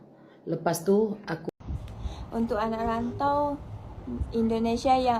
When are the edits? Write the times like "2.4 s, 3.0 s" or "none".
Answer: 1.4 s